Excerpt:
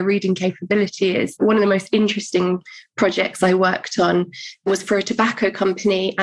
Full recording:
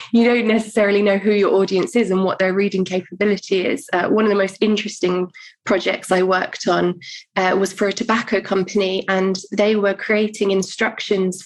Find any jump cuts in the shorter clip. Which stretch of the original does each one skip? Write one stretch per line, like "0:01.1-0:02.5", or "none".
0:03.9-0:04.1
0:07.4-0:07.6